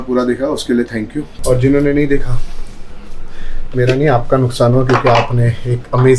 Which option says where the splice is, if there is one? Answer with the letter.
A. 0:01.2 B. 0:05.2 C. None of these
A